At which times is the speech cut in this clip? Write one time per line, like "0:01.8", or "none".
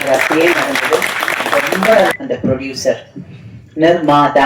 0:02.0